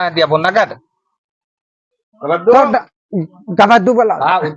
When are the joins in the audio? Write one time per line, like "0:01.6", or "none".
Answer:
0:02.1